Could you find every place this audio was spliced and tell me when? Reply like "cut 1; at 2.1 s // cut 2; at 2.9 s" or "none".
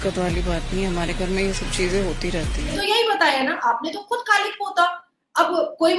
cut 1; at 2.8 s